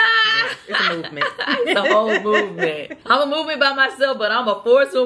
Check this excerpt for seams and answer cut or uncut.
cut